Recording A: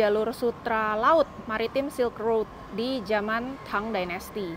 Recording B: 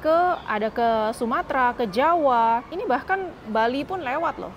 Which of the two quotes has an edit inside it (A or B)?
B